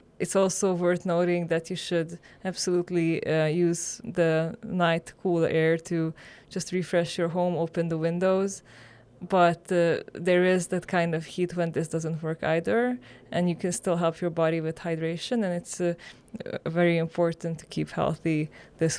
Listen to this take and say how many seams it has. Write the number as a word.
zero